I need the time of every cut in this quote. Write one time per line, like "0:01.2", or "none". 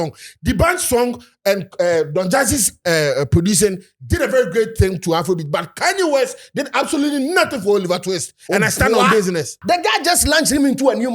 0:09.5